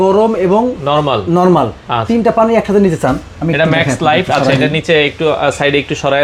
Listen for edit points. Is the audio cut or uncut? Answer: uncut